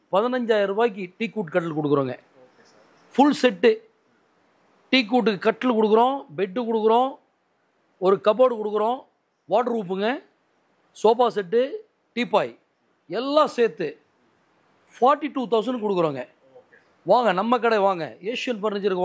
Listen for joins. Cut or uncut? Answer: uncut